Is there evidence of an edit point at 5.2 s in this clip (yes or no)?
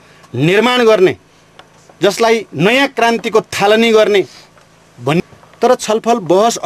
yes